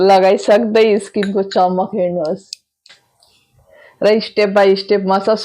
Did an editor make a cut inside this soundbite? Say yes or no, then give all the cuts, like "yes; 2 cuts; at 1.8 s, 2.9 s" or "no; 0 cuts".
yes; 1 cut; at 3.0 s